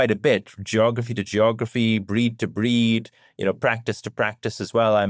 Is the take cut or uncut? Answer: uncut